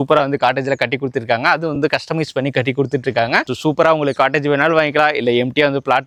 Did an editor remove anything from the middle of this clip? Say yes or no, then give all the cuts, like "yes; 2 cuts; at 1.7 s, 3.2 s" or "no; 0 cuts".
no; 0 cuts